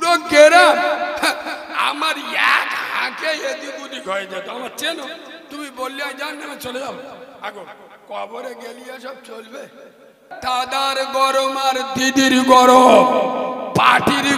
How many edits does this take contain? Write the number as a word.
one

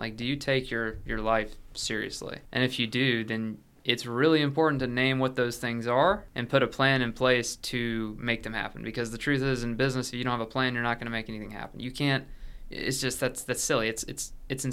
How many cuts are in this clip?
two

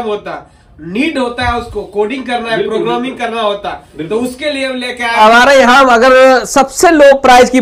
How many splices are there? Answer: one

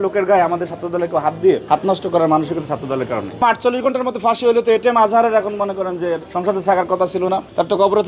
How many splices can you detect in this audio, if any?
three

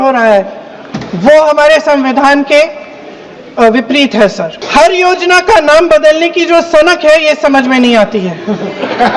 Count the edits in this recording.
one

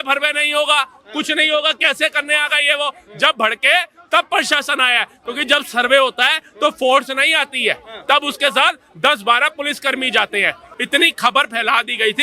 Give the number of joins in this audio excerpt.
one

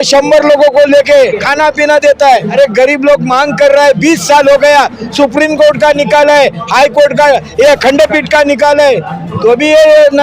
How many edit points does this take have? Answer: two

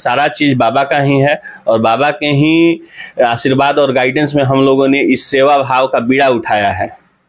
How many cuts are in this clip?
zero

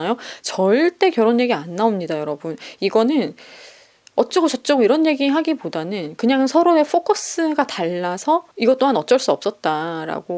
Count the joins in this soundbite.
zero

